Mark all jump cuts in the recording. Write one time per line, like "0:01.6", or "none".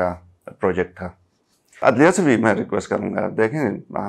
0:01.8